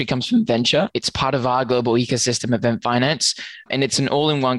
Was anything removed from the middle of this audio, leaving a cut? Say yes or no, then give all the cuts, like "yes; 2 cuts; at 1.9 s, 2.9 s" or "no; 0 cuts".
yes; 2 cuts; at 0.9 s, 3.7 s